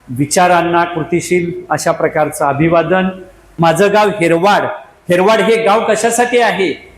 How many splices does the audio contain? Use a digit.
1